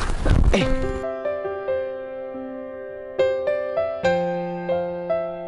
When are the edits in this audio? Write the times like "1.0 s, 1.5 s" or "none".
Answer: none